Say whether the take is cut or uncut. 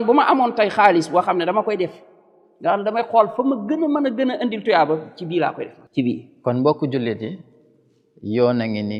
uncut